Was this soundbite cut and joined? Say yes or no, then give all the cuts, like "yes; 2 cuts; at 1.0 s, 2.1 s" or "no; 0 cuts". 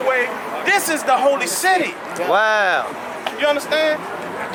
no; 0 cuts